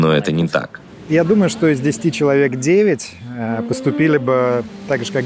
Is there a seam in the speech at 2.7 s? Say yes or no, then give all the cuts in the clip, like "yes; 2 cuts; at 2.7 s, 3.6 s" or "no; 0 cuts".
no; 1 cut; at 1.1 s